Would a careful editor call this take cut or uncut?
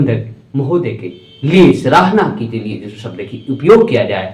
uncut